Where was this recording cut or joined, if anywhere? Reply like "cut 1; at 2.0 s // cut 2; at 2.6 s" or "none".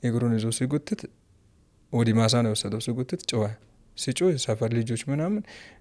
none